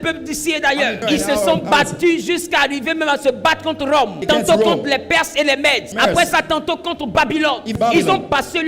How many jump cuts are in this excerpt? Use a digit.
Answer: 4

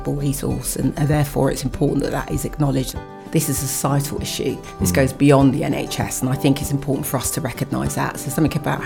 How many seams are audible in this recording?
1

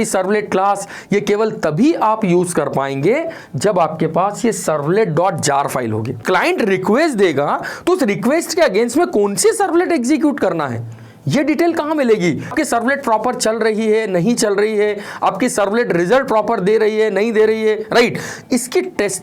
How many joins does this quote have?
2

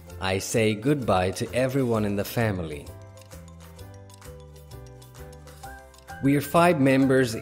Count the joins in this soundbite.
2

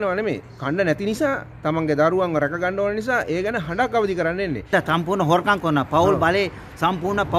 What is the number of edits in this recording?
1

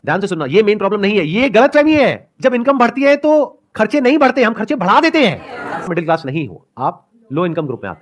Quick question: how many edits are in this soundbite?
1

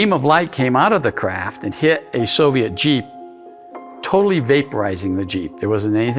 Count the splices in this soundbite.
0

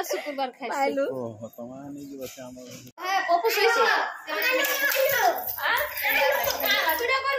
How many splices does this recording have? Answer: 1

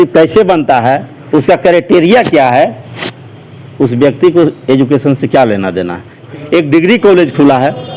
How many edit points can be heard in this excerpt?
1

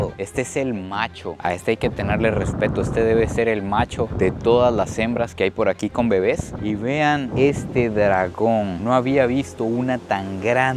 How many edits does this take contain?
1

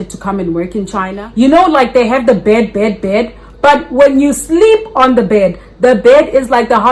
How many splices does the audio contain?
1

